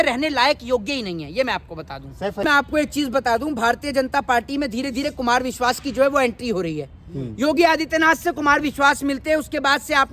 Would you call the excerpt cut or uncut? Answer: cut